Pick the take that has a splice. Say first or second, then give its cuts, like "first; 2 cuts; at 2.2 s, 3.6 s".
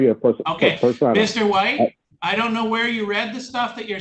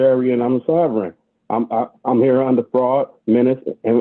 first; 1 cut; at 2.1 s